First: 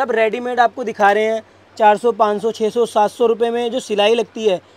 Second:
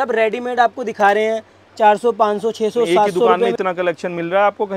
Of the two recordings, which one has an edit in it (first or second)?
second